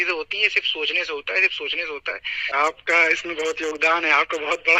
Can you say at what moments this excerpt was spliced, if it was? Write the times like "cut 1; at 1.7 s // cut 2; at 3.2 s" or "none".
cut 1; at 2.3 s